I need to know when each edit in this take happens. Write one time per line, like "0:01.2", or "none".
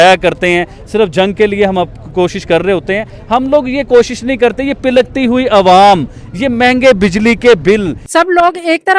0:08.0